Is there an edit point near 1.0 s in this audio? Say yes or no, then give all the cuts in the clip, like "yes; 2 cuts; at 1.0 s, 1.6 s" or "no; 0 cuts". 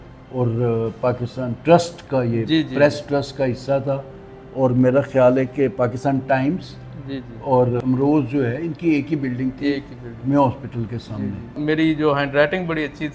no; 1 cut; at 11.6 s